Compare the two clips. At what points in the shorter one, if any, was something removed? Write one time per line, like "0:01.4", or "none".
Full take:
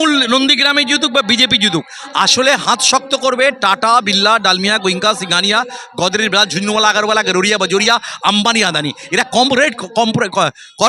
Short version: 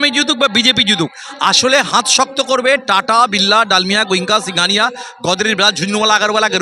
none